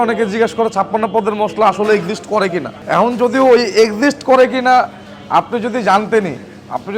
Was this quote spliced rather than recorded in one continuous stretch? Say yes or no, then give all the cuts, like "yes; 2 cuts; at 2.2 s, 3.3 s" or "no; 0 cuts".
yes; 1 cut; at 2.7 s